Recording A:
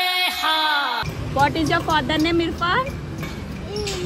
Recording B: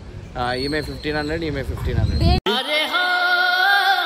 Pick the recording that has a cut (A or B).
A